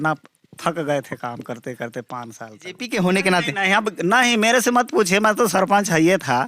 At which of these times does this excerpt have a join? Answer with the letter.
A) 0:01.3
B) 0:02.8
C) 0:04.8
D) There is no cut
B